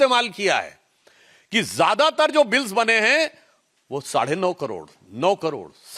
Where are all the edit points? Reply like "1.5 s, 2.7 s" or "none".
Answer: none